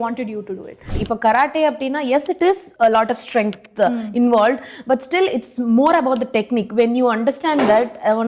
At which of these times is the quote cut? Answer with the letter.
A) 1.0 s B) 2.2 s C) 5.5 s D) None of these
A